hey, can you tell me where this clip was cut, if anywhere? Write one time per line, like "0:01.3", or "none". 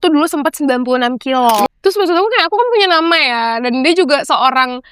0:01.7